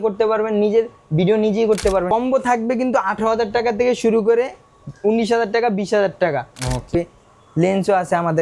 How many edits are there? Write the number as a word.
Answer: two